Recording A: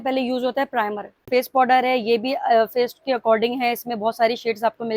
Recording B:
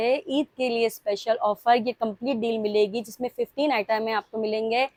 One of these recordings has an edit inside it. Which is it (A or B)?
A